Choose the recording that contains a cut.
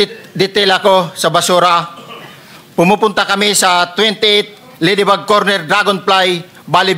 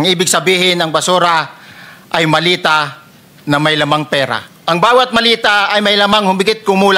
second; 1 cut; at 4.5 s

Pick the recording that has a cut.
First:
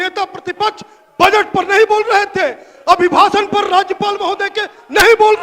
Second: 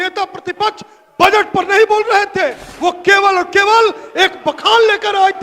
second; 1 cut; at 2.7 s

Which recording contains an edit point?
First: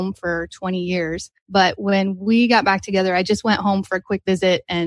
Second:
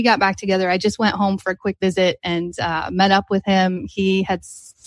first; 1 cut; at 1.3 s

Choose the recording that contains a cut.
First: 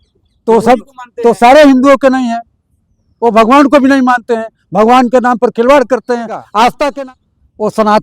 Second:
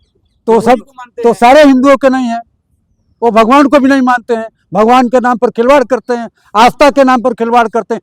first; 1 cut; at 7.0 s

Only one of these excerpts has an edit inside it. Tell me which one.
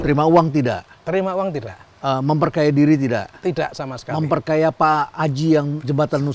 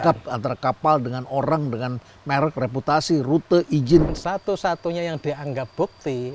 second; 1 cut; at 4.2 s

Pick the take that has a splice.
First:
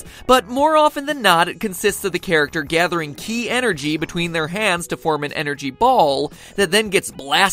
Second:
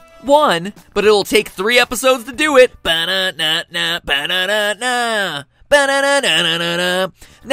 second; 1 cut; at 1.0 s

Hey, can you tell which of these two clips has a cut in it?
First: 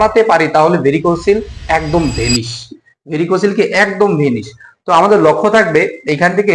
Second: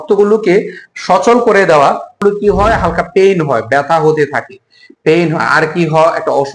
second; 1 cut; at 2.2 s

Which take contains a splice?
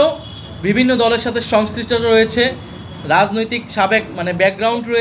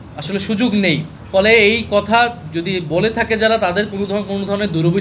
second; 1 cut; at 1.1 s

